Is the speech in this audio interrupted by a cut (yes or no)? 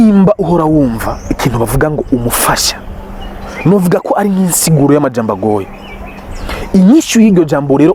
no